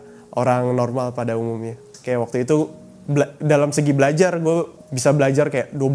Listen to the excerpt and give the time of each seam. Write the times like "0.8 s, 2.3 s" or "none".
1.9 s